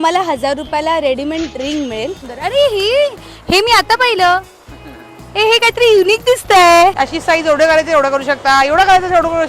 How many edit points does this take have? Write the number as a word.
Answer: two